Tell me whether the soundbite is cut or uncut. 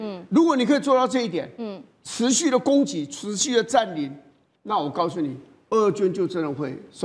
uncut